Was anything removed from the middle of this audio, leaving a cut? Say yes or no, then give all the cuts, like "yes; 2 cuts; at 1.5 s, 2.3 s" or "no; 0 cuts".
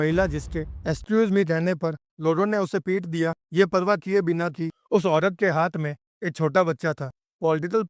no; 0 cuts